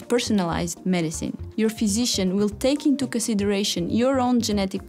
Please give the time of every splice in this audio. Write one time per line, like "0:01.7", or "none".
0:01.4